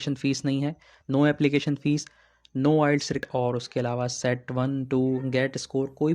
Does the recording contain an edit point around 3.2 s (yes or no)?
yes